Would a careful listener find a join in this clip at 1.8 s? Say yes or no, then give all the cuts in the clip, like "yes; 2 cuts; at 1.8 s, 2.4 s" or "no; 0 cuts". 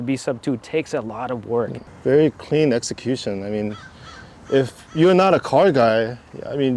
yes; 1 cut; at 1.8 s